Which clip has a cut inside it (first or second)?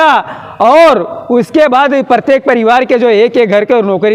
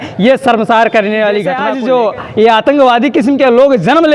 second